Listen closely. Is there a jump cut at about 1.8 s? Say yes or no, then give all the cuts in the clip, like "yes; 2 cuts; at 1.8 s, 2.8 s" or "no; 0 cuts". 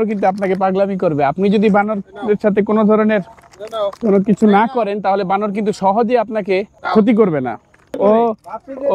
no; 2 cuts; at 6.8 s, 8.0 s